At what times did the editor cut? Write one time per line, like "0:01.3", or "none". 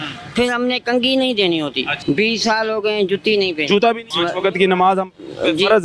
0:01.9
0:04.1